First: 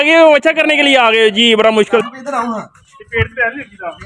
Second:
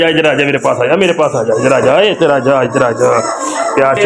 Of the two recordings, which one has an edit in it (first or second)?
first